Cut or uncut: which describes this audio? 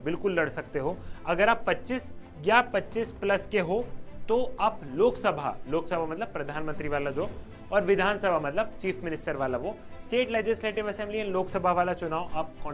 uncut